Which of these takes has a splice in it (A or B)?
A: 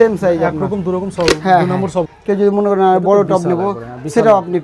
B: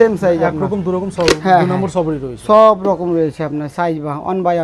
A